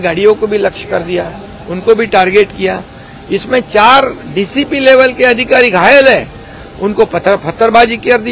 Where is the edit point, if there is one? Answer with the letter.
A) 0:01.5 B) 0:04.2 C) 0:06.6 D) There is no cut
D